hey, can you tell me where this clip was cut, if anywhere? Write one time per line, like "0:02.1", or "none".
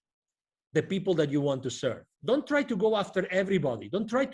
0:02.1